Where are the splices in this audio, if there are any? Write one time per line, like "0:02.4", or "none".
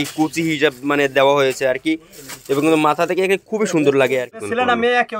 0:04.3